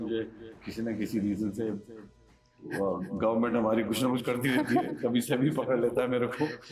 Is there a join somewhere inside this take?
no; 0 cuts

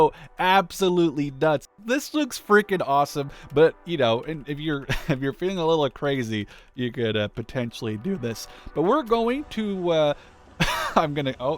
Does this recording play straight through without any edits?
no; 1 cut; at 1.8 s

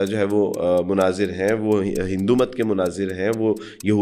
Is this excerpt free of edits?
yes; 0 cuts

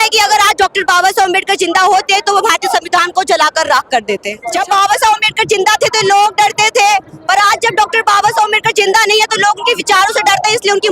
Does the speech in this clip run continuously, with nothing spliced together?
no; 1 cut; at 4.4 s

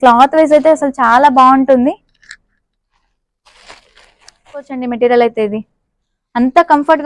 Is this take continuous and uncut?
no; 1 cut; at 4.7 s

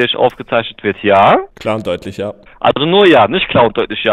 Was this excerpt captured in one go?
yes; 0 cuts

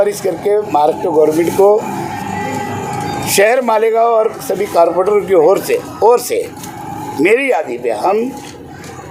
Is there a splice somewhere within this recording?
no; 0 cuts

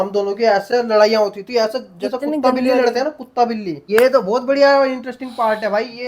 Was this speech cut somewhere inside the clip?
yes; 1 cut; at 3.8 s

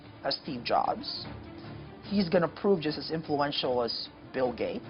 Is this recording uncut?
yes; 0 cuts

